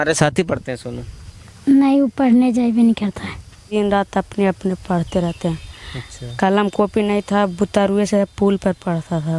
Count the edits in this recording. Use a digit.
1